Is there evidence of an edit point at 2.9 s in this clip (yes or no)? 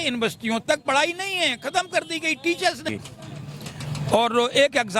yes